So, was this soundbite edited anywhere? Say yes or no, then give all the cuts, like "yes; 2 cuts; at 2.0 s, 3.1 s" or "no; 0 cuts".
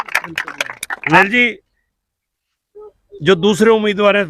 yes; 1 cut; at 1.1 s